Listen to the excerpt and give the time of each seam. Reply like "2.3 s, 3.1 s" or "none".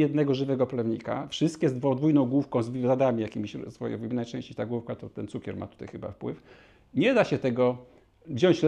none